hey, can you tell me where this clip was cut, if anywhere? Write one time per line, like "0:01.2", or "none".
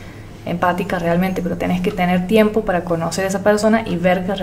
none